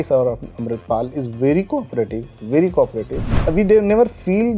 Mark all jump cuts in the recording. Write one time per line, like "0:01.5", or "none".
0:03.3